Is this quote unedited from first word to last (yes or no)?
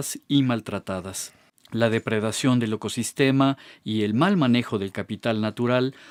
yes